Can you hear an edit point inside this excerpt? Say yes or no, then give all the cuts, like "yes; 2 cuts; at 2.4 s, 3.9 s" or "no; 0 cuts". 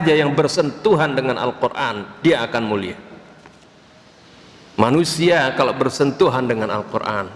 no; 0 cuts